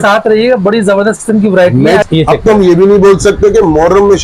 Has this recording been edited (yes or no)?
yes